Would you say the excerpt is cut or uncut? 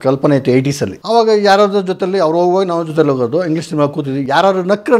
cut